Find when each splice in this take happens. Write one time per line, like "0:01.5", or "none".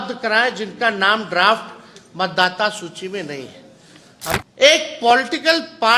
0:04.4